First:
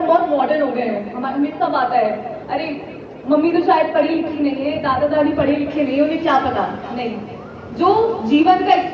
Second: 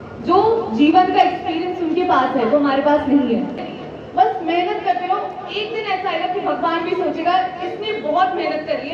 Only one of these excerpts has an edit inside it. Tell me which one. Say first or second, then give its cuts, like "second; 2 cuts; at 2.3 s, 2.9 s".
second; 1 cut; at 3.7 s